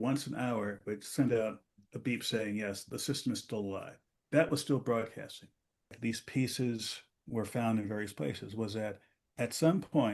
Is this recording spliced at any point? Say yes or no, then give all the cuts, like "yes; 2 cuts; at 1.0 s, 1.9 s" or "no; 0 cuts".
yes; 1 cut; at 6.0 s